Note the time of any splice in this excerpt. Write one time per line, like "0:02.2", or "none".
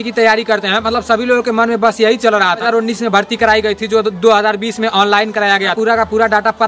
0:02.6
0:05.7